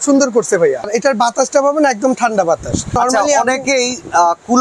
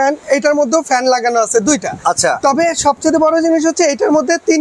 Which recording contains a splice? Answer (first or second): first